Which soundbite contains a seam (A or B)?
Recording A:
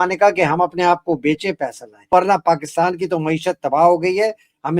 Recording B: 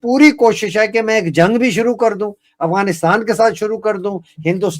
A